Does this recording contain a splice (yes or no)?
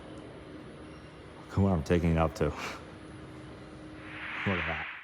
no